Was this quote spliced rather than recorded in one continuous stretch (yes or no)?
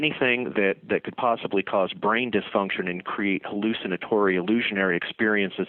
no